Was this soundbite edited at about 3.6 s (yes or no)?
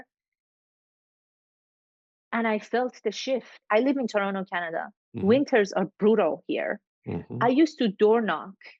yes